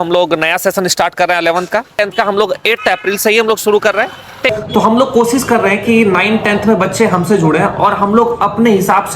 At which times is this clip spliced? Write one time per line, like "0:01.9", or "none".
0:02.0
0:04.5